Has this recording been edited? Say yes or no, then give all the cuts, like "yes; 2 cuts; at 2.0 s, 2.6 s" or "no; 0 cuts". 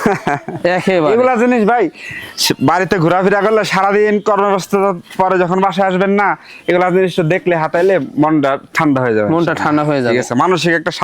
no; 0 cuts